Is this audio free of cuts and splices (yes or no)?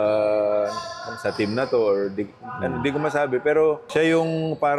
no